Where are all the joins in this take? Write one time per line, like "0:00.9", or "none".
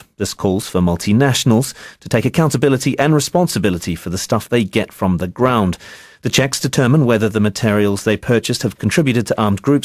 0:06.3

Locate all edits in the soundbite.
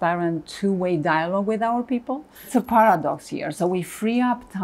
0:02.5

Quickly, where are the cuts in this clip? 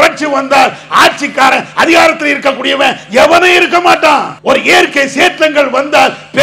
0:04.3

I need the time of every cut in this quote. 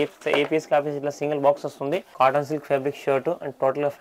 0:02.1

